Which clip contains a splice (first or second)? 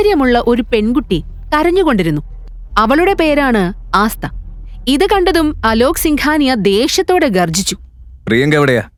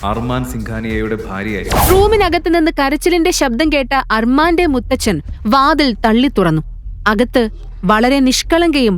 second